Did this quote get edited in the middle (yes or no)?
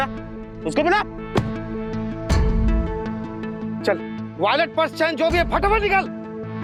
no